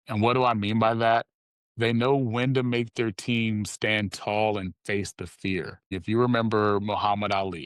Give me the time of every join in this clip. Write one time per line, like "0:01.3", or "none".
0:05.9

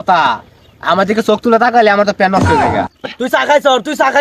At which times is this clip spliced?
0:02.8

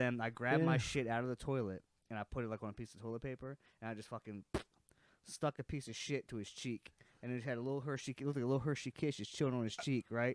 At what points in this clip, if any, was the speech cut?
none

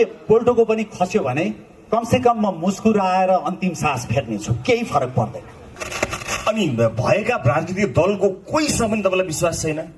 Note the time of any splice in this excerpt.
0:05.7

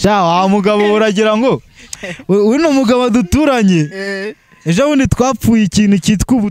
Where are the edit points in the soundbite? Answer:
none

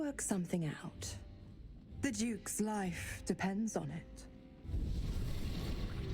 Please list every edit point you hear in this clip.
0:04.6

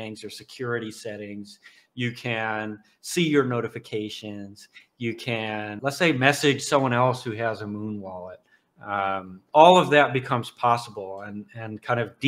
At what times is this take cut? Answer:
0:05.8

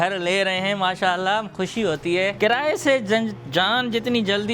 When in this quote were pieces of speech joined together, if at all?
0:02.3

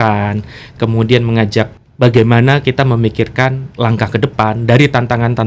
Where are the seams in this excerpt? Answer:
0:01.8

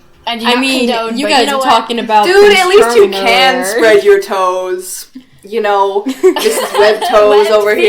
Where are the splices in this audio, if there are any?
none

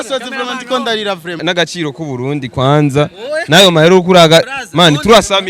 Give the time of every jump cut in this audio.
0:01.4

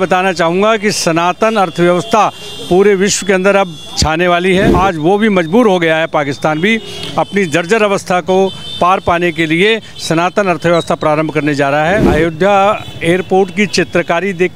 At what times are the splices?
0:04.7
0:12.1

